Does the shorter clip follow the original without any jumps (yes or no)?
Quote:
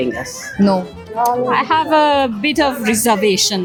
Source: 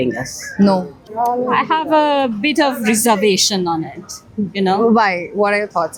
yes